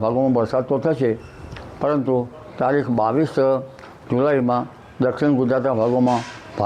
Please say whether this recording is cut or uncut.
uncut